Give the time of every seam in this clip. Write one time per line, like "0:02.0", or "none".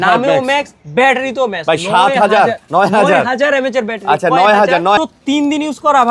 0:05.0